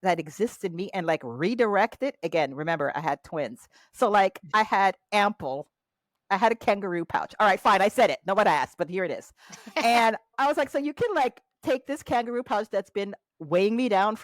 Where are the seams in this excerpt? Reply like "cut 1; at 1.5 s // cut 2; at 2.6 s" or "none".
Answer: cut 1; at 10.3 s